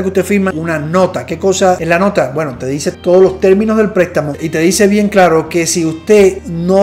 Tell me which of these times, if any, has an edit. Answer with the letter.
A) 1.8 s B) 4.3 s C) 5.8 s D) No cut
A